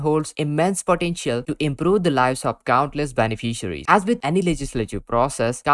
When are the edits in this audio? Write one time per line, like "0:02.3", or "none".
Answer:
0:01.4